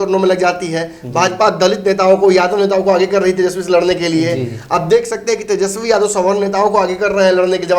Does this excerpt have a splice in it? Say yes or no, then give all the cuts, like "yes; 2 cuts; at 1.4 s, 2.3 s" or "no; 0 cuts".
no; 0 cuts